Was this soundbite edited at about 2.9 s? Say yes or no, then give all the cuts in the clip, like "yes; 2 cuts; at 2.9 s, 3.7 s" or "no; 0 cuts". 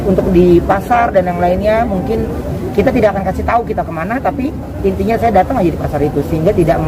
no; 0 cuts